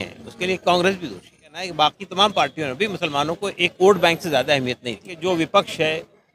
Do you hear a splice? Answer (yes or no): yes